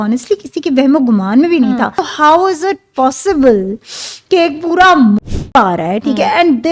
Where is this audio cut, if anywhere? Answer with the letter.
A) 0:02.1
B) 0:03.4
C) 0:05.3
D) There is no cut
A